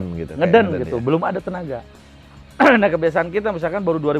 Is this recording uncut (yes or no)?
yes